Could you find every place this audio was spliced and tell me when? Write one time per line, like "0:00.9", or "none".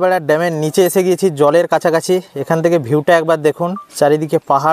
0:03.8

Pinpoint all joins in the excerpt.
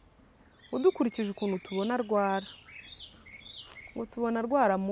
none

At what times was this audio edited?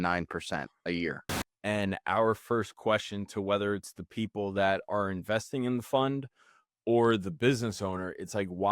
0:01.2

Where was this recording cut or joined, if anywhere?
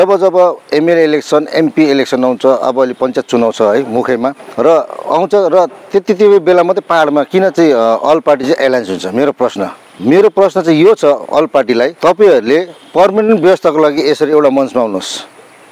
0:04.4
0:09.8
0:11.9

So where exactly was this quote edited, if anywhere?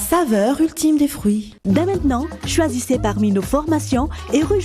0:01.5

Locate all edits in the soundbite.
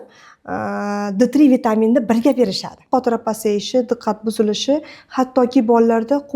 0:02.9

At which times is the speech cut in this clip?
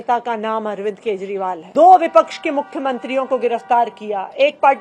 0:01.6

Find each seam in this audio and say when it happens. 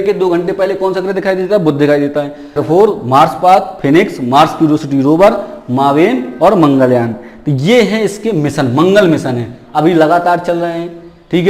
0:02.6

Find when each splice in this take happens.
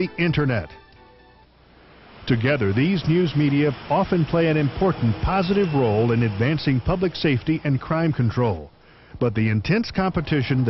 0:08.7

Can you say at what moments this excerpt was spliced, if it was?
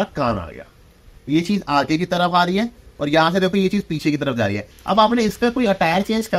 0:01.1
0:04.7

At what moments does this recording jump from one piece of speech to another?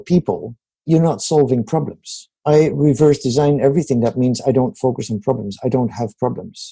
0:00.8
0:02.3

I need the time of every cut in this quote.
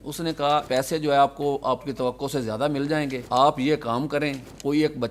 none

